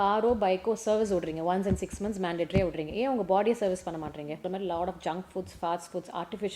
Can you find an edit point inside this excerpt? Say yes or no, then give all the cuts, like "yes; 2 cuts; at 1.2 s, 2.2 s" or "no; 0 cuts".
yes; 1 cut; at 4.4 s